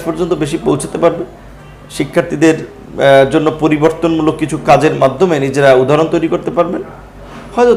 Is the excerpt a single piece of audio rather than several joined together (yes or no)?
yes